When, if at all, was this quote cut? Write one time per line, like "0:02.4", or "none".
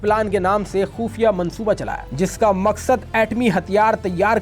0:02.0